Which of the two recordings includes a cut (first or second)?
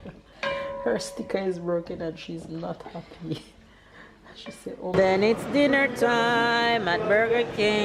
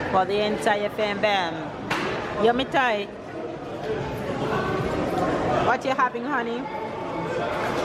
first